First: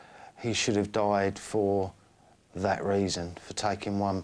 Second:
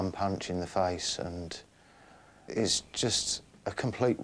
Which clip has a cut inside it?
second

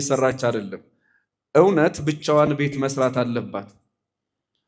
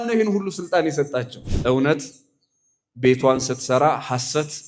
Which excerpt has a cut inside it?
second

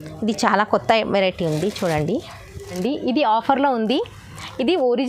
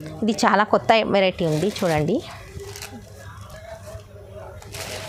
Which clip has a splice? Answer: first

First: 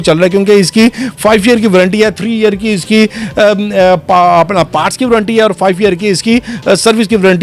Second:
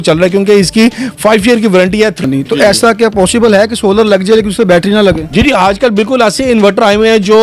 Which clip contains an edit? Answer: second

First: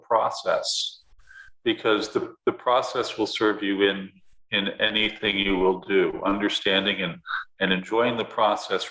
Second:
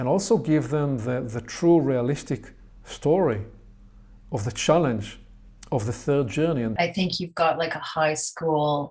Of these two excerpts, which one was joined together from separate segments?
second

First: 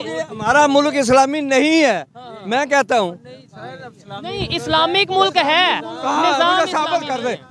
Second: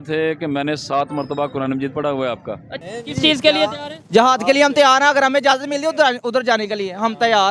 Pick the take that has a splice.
second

